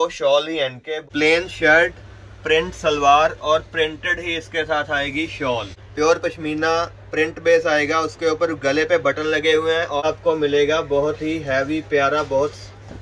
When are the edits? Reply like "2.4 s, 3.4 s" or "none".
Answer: 0.9 s, 5.8 s, 10.0 s